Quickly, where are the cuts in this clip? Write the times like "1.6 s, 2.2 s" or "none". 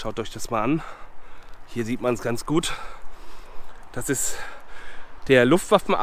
none